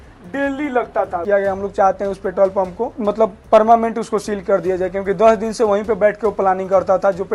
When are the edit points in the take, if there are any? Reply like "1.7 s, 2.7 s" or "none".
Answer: 1.2 s, 2.9 s